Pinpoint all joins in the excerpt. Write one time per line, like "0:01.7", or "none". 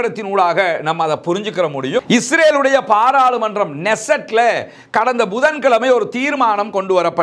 0:02.0